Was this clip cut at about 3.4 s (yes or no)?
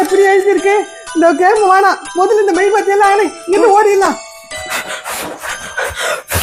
no